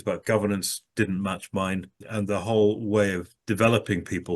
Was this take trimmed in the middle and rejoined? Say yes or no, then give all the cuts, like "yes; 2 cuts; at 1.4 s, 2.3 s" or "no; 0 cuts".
yes; 1 cut; at 2.0 s